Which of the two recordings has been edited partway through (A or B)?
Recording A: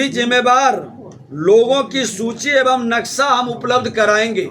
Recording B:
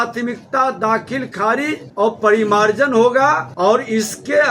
B